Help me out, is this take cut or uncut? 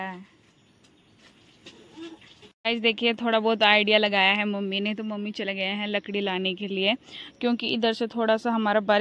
cut